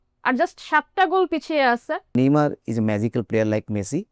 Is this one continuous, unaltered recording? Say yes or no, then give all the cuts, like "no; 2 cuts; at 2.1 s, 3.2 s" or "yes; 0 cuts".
no; 1 cut; at 2.1 s